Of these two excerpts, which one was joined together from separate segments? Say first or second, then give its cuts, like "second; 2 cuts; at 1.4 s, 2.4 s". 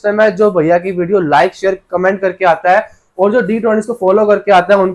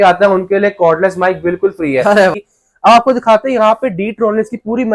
second; 1 cut; at 2.3 s